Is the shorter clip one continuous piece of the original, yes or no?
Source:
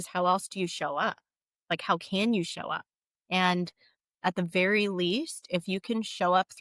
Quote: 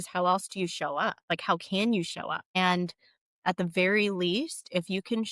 no